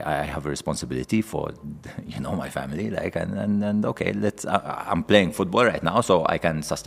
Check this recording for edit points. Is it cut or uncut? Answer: uncut